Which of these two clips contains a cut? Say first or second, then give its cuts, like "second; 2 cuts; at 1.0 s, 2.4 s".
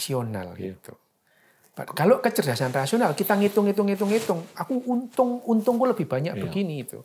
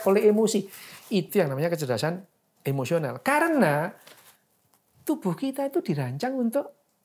second; 1 cut; at 1.3 s